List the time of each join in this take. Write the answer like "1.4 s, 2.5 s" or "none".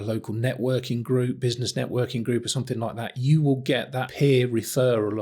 4.0 s

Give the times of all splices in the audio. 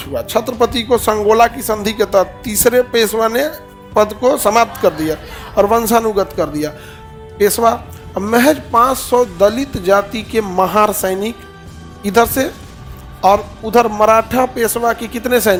none

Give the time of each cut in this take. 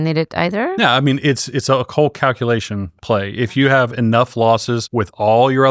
4.8 s

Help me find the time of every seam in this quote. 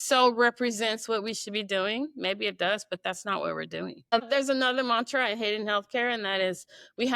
4.1 s

